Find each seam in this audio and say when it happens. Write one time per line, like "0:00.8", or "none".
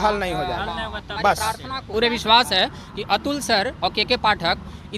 0:01.9